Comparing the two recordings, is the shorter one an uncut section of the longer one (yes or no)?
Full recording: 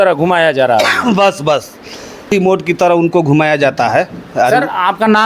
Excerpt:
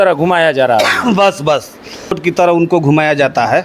no